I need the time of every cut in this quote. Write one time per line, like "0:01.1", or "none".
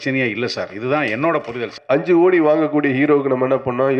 0:01.8